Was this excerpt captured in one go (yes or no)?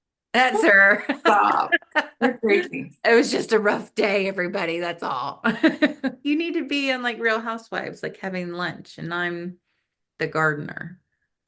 no